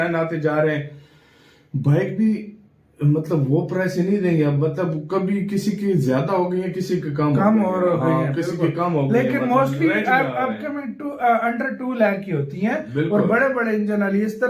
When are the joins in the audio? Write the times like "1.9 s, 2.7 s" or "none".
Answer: none